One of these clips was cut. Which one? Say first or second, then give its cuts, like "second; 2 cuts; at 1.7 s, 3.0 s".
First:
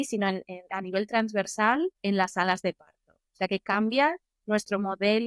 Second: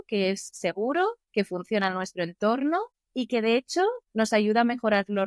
second; 3 cuts; at 1.2 s, 3.0 s, 4.0 s